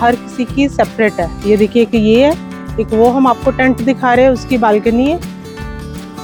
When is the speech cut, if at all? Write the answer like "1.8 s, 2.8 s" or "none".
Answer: none